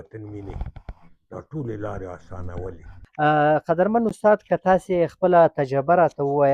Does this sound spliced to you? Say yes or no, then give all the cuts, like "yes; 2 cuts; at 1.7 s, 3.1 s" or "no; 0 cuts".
yes; 1 cut; at 3.0 s